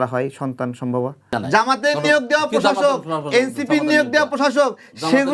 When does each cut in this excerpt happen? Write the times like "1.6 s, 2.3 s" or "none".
1.3 s